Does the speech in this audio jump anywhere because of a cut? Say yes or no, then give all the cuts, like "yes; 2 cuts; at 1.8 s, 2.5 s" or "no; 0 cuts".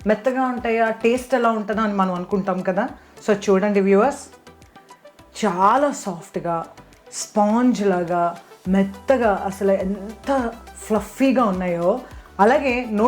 yes; 1 cut; at 12.1 s